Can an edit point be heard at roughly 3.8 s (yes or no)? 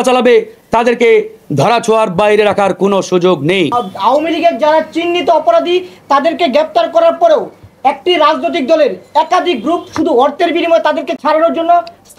yes